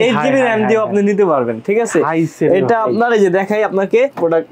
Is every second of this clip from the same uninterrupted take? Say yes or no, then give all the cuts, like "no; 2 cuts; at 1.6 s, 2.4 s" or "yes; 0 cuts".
yes; 0 cuts